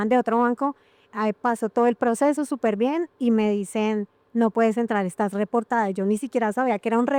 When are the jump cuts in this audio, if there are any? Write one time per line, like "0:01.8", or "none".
none